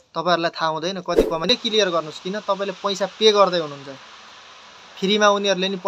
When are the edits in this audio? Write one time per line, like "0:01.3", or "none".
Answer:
0:01.5